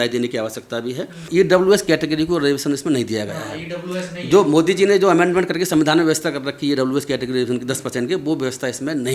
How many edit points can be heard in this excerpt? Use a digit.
1